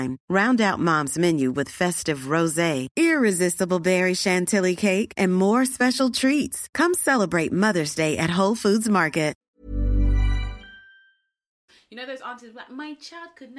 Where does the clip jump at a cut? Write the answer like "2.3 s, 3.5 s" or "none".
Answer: 9.5 s, 11.6 s